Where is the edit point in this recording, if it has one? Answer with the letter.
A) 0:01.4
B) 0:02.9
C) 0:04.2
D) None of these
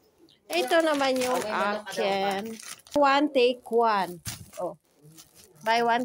B